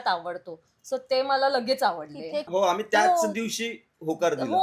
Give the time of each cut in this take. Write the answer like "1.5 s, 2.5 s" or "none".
2.5 s

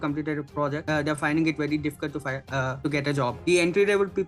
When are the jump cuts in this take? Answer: 0.8 s, 3.0 s

